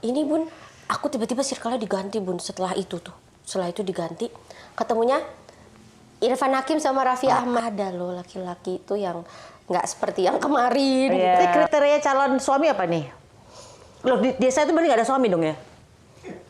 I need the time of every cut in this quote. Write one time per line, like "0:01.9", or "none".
0:07.6
0:11.5